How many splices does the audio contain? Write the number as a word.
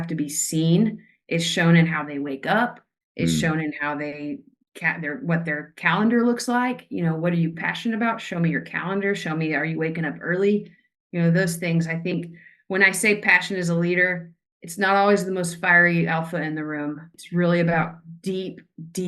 one